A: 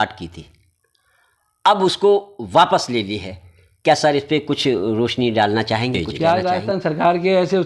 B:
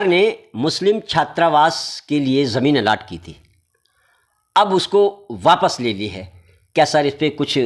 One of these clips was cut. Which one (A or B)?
A